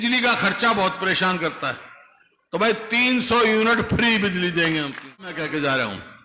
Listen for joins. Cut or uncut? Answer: cut